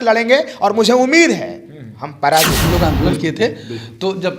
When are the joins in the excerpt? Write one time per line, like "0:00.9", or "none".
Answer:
0:02.6